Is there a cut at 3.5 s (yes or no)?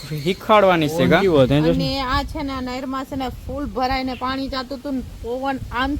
no